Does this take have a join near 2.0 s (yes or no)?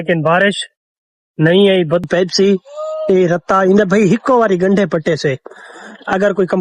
yes